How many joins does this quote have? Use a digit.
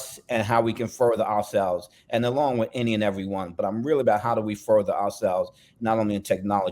0